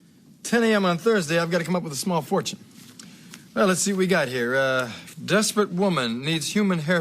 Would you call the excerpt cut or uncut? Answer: cut